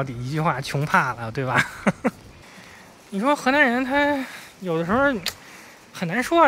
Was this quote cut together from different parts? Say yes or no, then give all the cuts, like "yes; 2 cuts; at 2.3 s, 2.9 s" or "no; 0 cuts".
yes; 1 cut; at 2.3 s